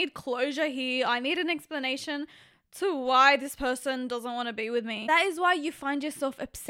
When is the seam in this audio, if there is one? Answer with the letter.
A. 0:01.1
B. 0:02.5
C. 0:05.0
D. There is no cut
C